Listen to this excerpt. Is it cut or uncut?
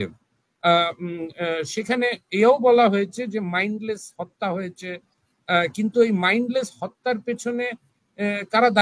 uncut